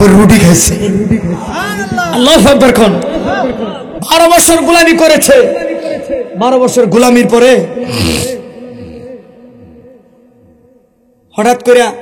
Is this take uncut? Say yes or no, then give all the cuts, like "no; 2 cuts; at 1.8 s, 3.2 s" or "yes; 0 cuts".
no; 1 cut; at 3.9 s